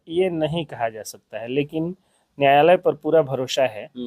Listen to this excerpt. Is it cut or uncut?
uncut